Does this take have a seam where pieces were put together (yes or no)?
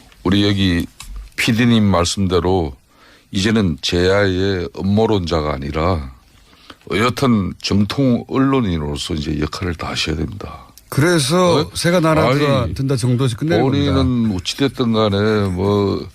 yes